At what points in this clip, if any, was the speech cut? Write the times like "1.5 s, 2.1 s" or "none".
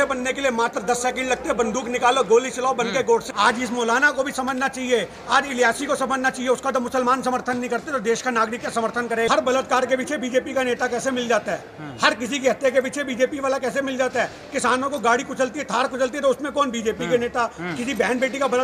3.2 s, 9.3 s